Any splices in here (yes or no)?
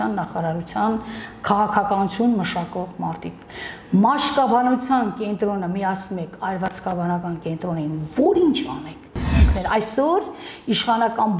yes